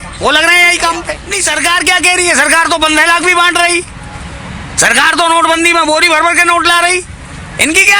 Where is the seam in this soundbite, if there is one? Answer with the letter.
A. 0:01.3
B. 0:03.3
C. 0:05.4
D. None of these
A